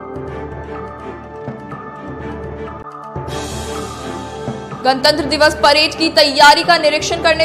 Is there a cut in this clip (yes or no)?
no